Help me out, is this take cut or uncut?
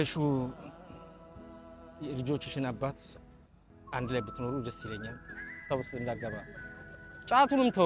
cut